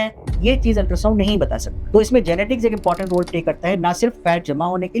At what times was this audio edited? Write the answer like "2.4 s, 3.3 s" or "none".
1.7 s